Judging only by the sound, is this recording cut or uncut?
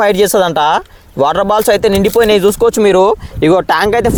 uncut